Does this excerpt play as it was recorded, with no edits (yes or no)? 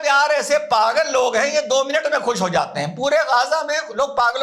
yes